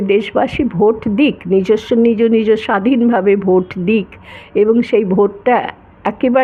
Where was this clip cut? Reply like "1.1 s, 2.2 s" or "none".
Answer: none